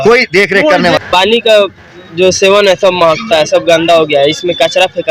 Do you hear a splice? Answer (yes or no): yes